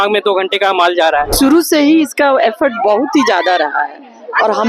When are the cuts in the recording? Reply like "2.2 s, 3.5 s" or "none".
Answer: 1.3 s